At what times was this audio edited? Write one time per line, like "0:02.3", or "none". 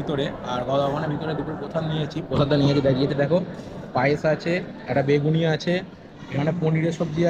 none